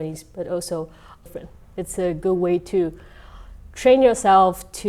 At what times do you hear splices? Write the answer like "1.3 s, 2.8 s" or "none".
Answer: 1.2 s